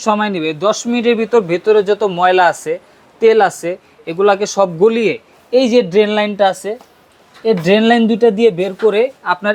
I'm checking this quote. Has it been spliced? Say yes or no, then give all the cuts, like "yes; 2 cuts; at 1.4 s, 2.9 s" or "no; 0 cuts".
no; 0 cuts